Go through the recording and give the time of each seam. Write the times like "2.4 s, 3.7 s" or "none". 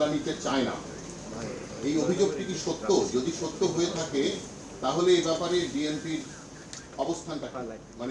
none